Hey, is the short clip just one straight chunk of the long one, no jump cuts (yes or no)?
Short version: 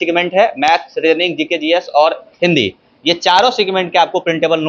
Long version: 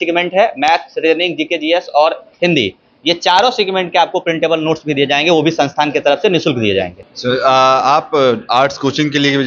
yes